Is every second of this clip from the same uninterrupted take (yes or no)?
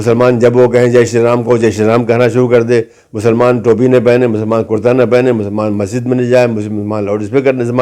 yes